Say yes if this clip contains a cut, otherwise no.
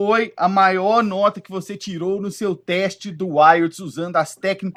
no